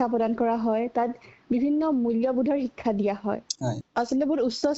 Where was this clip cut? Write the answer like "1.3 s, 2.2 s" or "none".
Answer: 3.8 s